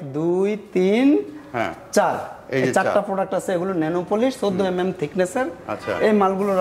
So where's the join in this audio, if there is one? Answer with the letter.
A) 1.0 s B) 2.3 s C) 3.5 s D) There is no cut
D